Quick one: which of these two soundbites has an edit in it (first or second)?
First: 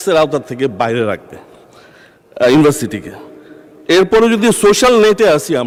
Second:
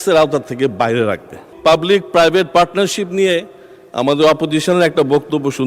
second